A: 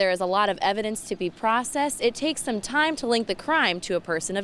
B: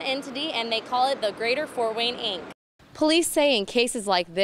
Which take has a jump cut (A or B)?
B